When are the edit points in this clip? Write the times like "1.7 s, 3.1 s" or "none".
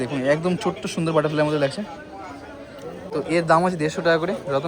none

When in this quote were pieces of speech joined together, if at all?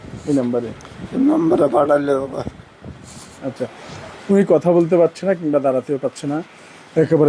none

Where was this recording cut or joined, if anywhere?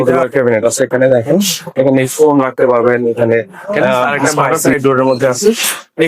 4.6 s

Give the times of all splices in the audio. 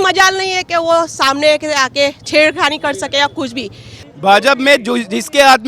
4.0 s

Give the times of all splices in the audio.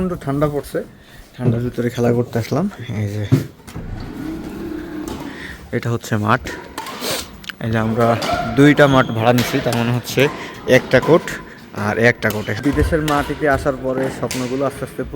12.7 s

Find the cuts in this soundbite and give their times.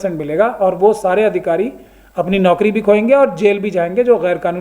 none

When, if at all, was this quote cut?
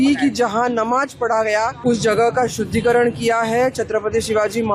1.8 s

